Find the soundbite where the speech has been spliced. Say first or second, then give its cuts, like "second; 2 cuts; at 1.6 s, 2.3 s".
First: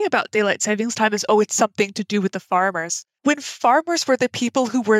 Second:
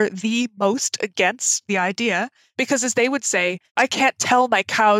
second; 3 cuts; at 1.7 s, 2.4 s, 3.7 s